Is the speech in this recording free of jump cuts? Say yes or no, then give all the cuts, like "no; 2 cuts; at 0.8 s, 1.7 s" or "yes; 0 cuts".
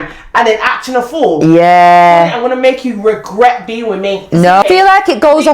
no; 1 cut; at 4.6 s